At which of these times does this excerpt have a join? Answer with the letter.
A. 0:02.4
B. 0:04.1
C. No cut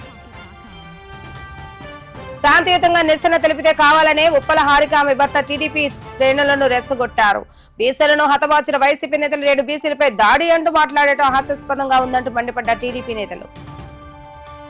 A